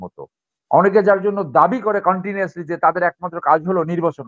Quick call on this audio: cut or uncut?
uncut